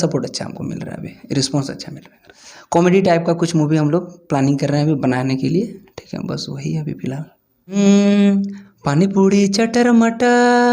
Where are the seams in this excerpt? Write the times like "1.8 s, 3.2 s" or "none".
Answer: 2.3 s, 7.8 s